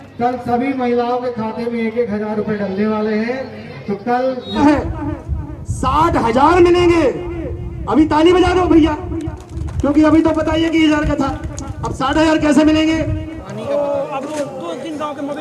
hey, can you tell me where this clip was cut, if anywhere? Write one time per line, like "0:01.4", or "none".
0:04.5
0:13.4